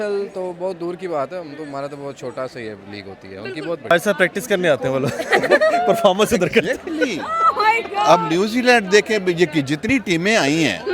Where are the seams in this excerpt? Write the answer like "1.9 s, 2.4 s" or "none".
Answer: 3.9 s

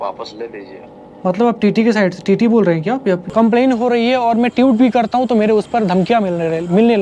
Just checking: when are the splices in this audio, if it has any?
3.2 s

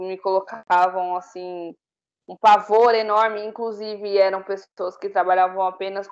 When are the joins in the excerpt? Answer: none

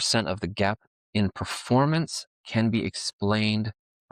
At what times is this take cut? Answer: 0.9 s

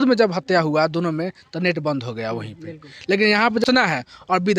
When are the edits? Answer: 3.6 s

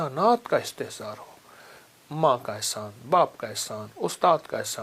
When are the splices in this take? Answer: none

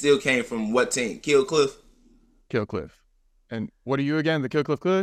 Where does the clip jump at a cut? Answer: none

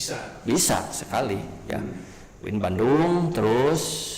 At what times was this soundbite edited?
1.6 s

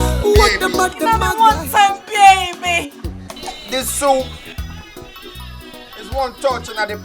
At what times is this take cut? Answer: 1.0 s

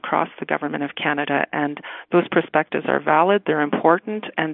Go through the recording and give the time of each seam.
none

